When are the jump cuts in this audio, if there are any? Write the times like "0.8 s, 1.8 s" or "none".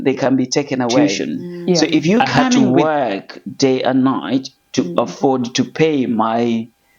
2.6 s